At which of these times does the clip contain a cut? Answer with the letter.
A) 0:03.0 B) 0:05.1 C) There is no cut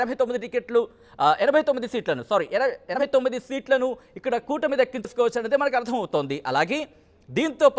B